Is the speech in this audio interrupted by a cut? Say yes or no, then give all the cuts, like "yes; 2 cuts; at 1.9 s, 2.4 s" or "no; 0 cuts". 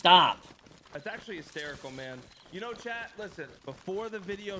yes; 1 cut; at 0.9 s